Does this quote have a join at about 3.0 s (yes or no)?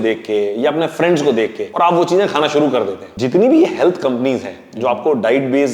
yes